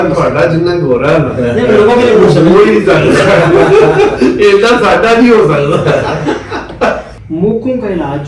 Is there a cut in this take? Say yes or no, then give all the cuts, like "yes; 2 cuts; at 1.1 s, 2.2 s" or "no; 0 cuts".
yes; 1 cut; at 7.1 s